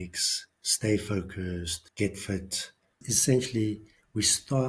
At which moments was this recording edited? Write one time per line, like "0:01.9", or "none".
0:01.8
0:03.1